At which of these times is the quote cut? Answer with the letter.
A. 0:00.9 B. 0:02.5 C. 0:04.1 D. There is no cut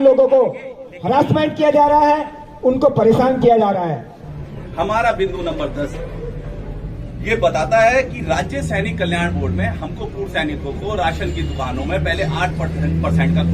C